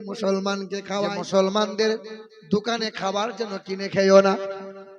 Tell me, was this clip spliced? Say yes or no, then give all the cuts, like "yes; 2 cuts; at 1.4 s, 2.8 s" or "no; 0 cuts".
yes; 1 cut; at 0.9 s